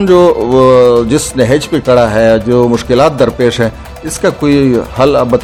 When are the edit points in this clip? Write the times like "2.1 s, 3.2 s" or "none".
none